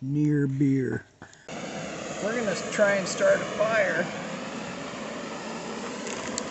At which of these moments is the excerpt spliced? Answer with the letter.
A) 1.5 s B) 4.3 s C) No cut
A